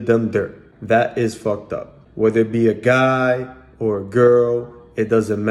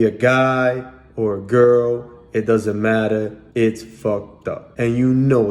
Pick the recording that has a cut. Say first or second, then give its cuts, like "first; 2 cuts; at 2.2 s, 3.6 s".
second; 1 cut; at 4.6 s